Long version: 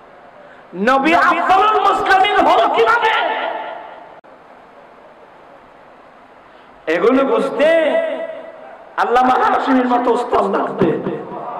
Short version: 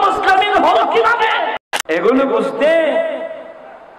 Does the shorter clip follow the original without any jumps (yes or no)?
no